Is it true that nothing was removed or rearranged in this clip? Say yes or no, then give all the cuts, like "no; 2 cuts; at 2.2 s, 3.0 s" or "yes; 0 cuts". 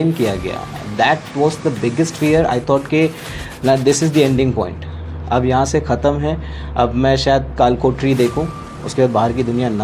yes; 0 cuts